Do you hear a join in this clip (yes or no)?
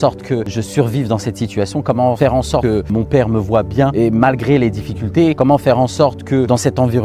no